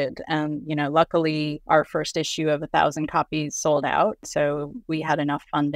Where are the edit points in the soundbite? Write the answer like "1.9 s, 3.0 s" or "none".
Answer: 1.6 s, 4.3 s